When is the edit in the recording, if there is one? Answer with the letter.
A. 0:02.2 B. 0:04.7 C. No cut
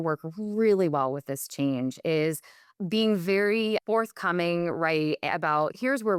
C